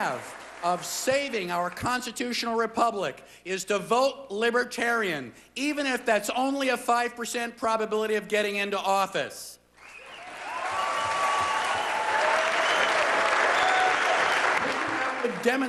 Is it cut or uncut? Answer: uncut